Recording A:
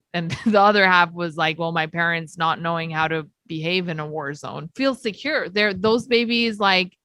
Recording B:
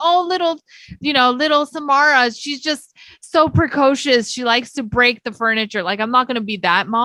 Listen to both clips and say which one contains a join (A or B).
A